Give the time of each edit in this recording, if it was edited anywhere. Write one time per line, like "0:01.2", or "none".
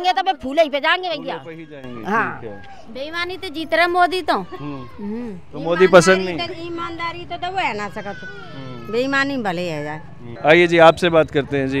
none